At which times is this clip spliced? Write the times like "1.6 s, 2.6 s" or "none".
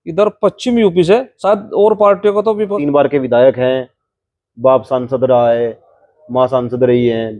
1.3 s, 2.8 s